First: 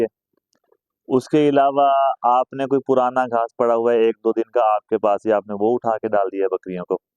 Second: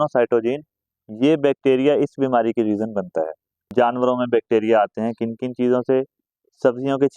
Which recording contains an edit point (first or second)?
second